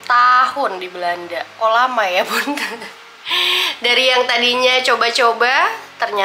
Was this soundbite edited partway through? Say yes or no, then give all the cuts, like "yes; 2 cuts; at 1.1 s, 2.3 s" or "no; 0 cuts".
no; 0 cuts